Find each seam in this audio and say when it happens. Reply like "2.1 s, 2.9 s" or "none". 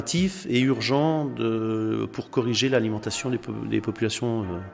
none